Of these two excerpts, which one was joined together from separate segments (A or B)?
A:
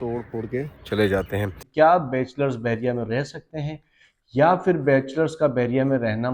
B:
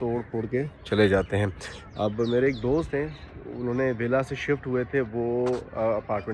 A